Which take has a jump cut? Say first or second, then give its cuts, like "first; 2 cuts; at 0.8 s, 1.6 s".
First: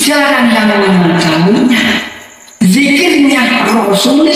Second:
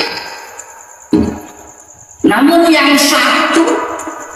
second; 1 cut; at 1.1 s